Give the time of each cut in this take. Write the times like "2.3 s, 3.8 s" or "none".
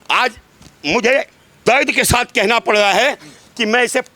1.5 s